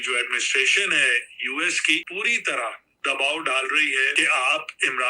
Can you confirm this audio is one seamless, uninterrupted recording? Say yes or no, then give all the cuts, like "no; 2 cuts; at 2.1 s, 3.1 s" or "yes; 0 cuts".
no; 2 cuts; at 2.1 s, 4.1 s